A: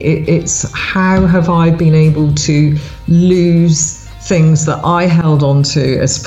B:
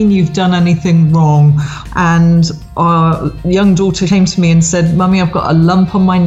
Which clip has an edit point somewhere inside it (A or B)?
B